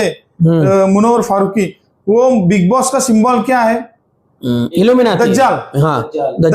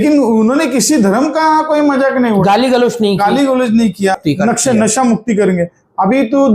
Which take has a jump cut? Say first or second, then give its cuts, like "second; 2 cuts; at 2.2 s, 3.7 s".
second; 1 cut; at 4.2 s